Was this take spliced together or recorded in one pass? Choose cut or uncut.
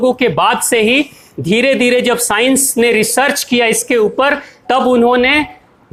uncut